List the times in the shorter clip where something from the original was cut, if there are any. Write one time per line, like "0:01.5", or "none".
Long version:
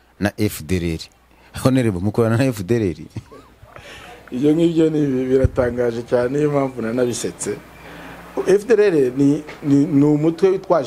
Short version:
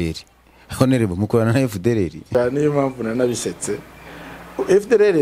0:02.2

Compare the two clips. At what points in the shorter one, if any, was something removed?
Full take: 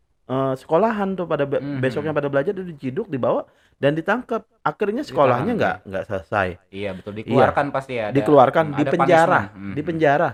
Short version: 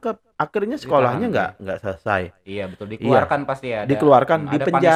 none

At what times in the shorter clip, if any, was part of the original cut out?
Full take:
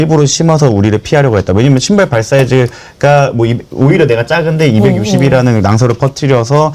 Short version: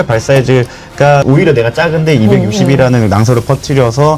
0:01.2

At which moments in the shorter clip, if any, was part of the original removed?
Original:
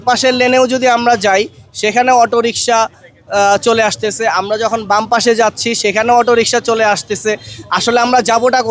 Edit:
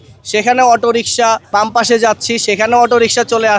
0:01.5

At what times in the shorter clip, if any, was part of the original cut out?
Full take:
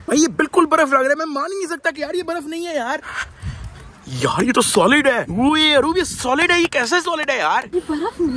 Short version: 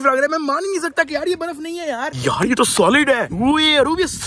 0:02.1

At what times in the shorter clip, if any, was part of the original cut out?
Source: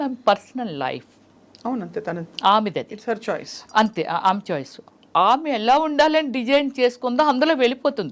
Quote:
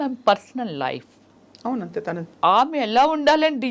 0:02.2

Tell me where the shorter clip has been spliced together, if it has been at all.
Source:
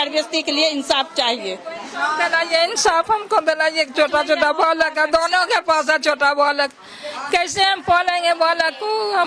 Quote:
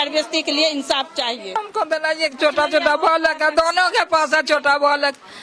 0:01.6

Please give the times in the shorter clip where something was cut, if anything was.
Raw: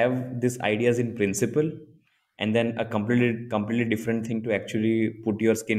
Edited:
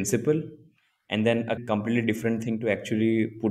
0:01.6

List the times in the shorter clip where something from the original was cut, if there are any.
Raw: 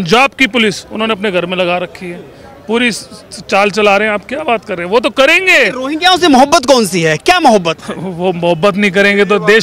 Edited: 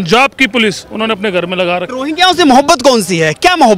0:01.9

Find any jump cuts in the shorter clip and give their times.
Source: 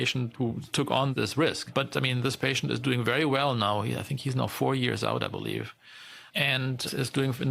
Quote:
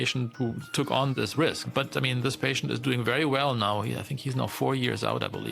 none

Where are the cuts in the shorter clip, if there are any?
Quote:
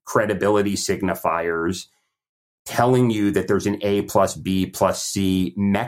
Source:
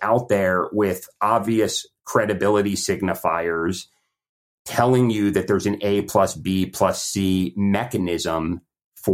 none

